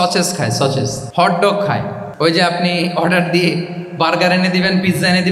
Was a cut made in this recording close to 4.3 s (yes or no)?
no